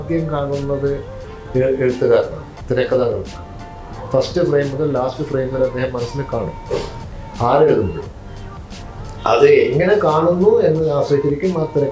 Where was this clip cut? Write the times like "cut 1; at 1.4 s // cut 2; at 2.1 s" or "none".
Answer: none